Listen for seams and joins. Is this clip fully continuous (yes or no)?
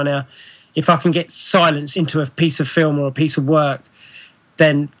no